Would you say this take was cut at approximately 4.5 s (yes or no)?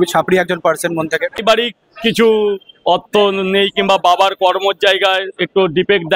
no